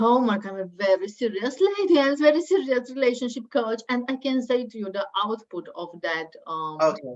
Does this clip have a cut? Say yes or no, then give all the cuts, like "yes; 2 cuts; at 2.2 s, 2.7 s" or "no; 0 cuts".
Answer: no; 0 cuts